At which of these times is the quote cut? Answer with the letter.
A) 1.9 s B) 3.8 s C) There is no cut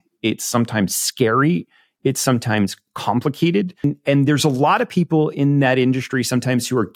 B